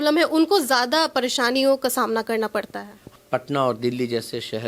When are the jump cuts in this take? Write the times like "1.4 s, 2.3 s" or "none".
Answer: 3.1 s